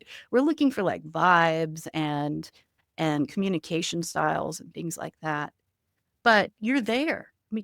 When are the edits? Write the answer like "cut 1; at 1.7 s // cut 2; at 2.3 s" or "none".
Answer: none